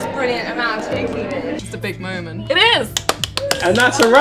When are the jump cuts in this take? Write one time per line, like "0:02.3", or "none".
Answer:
0:01.5